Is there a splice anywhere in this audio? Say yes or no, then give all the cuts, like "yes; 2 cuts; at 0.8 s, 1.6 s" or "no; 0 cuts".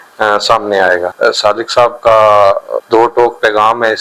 yes; 2 cuts; at 1.1 s, 2.8 s